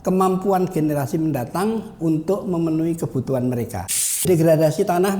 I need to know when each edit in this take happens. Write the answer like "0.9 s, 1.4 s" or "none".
4.2 s